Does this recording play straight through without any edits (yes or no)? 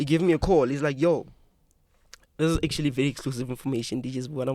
yes